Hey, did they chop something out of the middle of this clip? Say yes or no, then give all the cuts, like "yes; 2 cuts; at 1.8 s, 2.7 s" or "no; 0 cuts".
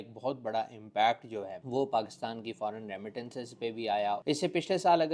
yes; 1 cut; at 4.2 s